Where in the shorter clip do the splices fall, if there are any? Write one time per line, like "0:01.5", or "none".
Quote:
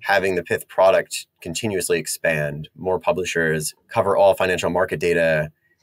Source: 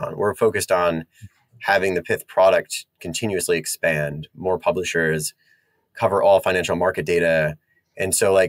0:03.8